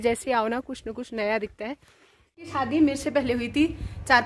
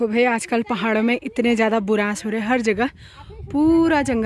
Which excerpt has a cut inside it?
first; 1 cut; at 2.5 s

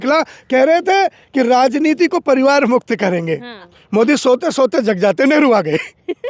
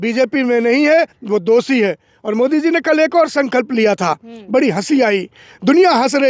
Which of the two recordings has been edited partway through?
first; 1 cut; at 3.6 s

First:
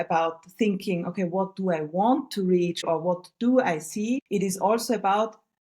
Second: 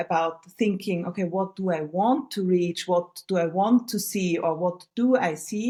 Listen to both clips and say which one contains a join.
first; 1 cut; at 2.8 s

